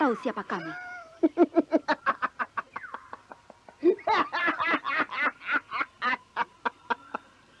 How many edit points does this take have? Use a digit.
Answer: 0